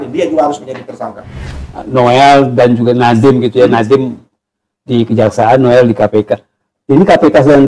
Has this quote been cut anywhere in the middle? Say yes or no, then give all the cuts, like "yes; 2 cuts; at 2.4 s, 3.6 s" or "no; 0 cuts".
yes; 1 cut; at 1.6 s